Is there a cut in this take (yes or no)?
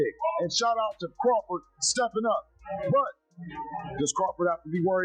no